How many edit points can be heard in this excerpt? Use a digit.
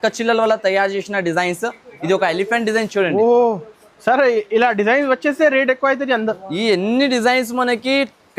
0